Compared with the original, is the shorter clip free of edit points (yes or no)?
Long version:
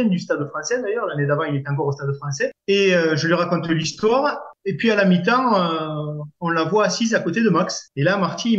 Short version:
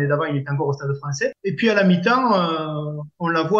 no